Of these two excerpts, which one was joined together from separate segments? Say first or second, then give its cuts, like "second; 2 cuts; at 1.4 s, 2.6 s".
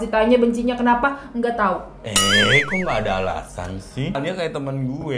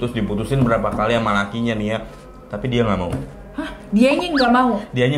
first; 1 cut; at 4.1 s